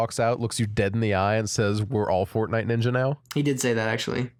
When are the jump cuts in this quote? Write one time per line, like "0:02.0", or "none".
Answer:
none